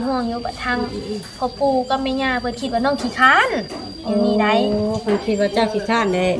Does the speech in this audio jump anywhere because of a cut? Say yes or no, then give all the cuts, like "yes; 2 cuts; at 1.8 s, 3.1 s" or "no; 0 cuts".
no; 0 cuts